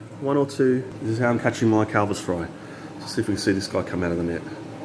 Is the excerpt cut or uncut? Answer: cut